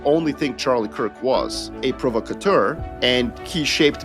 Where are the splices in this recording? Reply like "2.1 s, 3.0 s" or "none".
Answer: 1.7 s, 3.1 s